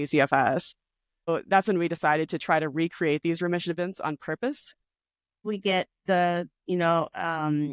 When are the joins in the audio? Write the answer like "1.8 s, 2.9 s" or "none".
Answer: 1.3 s, 5.4 s